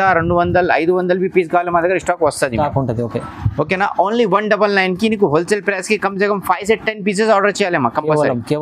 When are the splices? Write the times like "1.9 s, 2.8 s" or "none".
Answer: none